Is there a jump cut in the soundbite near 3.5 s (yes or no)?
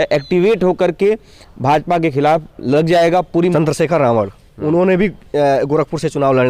yes